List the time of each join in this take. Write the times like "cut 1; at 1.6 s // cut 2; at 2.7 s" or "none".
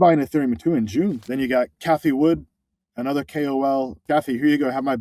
cut 1; at 1.3 s // cut 2; at 4.0 s